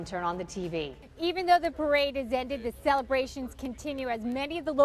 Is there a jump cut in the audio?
yes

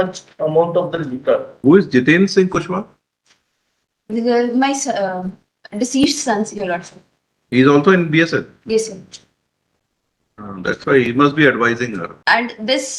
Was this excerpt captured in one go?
no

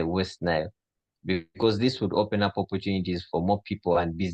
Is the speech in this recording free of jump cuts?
yes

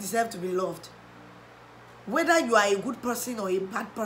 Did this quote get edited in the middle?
no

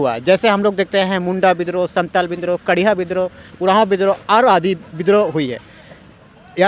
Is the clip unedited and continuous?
yes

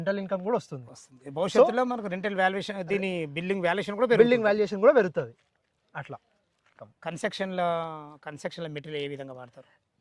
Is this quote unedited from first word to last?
yes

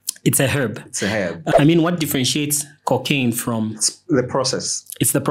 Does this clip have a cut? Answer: yes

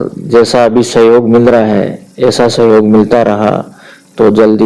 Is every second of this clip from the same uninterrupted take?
yes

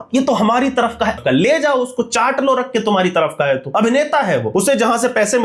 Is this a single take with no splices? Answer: no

